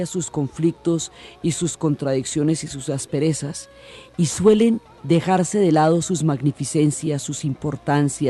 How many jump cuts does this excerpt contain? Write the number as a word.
one